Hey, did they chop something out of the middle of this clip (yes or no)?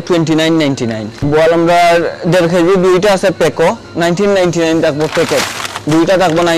no